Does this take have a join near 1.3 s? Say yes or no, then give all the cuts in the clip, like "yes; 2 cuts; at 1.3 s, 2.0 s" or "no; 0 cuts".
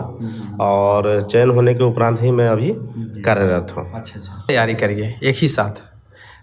no; 1 cut; at 4.5 s